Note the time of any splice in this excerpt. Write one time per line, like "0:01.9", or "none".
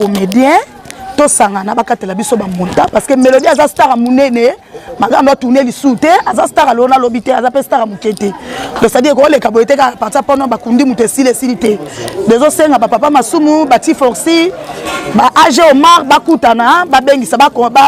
none

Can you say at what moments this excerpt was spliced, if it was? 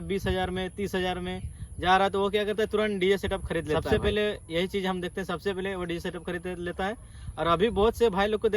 0:03.8

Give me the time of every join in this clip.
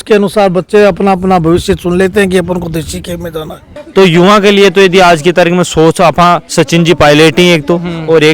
0:03.7

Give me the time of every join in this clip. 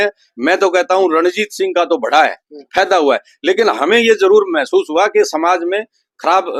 none

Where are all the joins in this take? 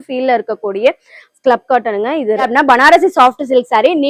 0:02.5

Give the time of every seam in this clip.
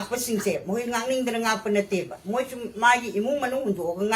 none

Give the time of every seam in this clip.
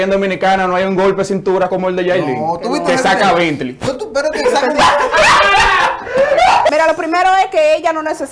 0:01.7
0:06.7

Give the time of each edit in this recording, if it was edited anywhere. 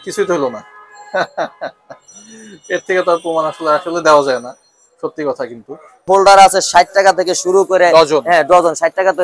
0:06.1

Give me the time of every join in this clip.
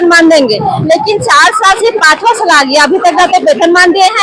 none

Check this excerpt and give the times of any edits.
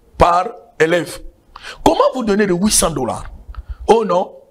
none

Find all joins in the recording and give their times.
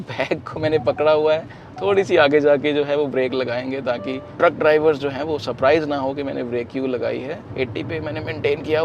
0:04.2
0:07.4

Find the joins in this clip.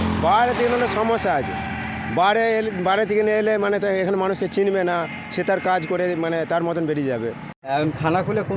0:07.5

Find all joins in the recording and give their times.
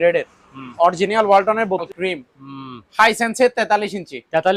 0:01.9

